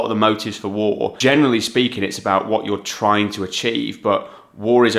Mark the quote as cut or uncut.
cut